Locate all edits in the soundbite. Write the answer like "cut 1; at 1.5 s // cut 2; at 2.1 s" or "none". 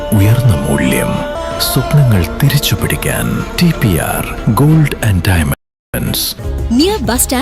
cut 1; at 6.2 s

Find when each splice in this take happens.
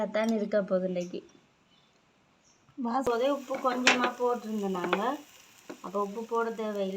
cut 1; at 3.1 s

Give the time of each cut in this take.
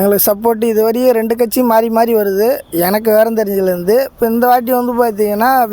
none

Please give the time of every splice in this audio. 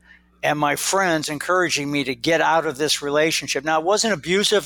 none

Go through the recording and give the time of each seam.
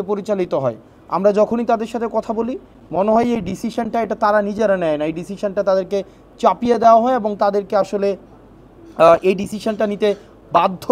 none

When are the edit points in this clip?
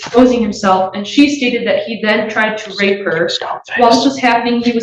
none

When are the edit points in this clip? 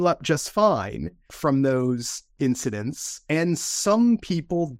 cut 1; at 2.3 s // cut 2; at 3.1 s

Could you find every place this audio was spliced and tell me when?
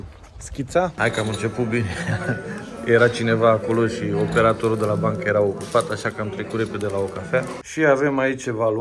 cut 1; at 0.9 s // cut 2; at 7.6 s

